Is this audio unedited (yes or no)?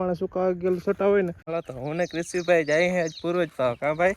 no